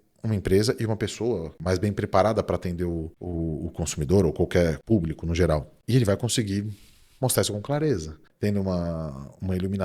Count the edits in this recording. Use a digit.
5